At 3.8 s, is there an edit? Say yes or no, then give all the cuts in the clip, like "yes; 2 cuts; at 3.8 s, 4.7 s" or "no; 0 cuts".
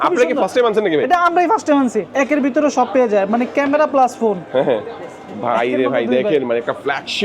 no; 1 cut; at 2.0 s